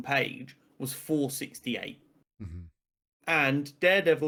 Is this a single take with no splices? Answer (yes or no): yes